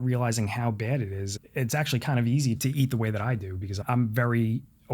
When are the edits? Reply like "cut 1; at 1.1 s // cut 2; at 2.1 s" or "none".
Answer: cut 1; at 1.3 s // cut 2; at 2.6 s // cut 3; at 3.8 s